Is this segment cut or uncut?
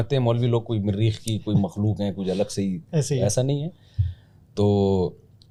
uncut